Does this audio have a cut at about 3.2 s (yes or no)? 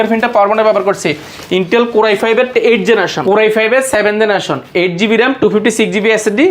yes